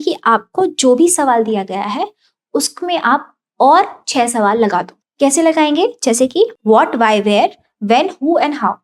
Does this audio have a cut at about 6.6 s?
yes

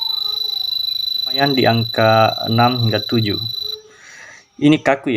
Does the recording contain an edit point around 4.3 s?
no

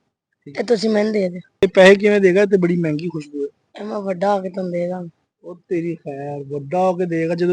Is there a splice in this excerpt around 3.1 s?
no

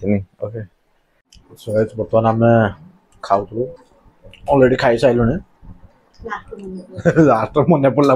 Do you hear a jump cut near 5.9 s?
no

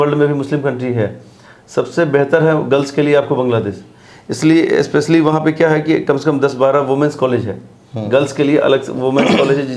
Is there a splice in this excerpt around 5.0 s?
no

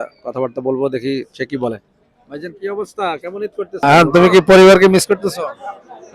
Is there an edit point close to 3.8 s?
yes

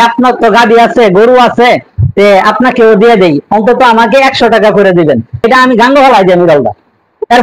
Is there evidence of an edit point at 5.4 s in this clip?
yes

